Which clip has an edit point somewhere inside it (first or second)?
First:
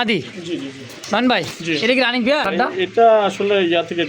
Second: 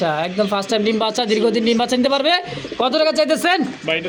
first